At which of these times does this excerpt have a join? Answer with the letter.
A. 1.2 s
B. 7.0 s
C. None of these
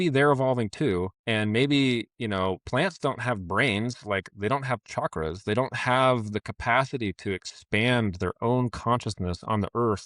A